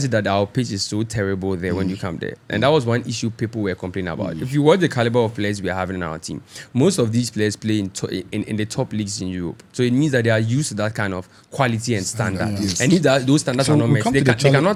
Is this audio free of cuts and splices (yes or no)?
yes